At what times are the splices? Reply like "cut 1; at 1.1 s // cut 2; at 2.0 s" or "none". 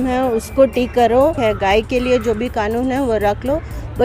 cut 1; at 1.4 s